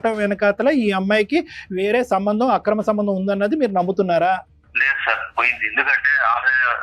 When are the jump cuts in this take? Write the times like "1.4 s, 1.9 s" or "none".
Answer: 4.6 s